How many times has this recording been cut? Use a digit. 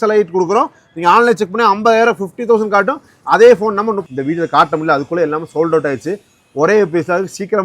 1